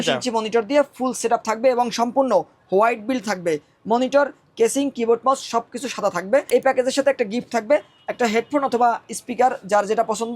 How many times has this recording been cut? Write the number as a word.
one